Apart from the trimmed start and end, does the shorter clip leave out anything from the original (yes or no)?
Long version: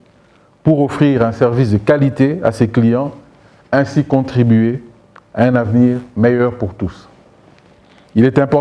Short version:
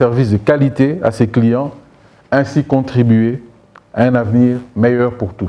no